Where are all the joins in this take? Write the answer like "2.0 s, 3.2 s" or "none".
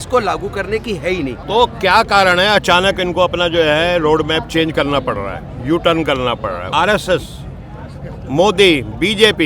1.4 s, 6.7 s